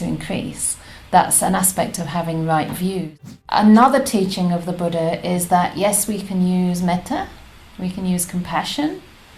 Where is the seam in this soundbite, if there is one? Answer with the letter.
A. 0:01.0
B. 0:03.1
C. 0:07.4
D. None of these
B